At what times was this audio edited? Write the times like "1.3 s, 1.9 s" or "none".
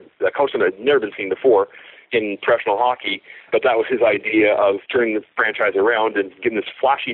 3.5 s, 4.8 s